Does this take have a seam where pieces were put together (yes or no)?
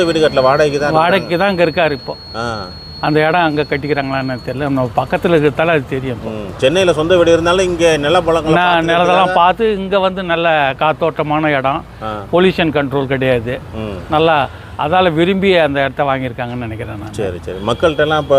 no